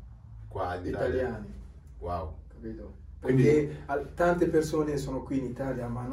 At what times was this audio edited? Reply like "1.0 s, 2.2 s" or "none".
none